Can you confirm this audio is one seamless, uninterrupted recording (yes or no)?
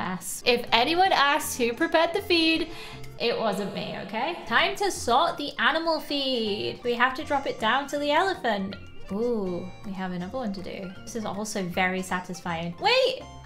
yes